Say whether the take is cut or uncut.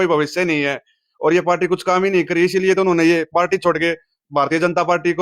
uncut